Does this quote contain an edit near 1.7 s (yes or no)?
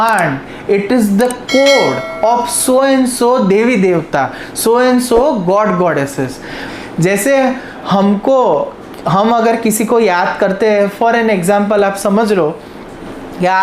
no